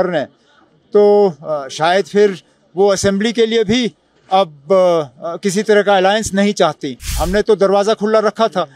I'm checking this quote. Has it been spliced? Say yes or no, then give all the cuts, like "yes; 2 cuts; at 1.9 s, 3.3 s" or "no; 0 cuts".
yes; 1 cut; at 7.2 s